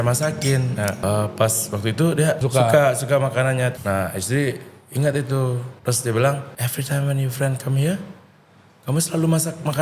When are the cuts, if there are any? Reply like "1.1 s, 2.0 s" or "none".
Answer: 1.0 s, 2.4 s, 3.7 s, 5.7 s, 6.6 s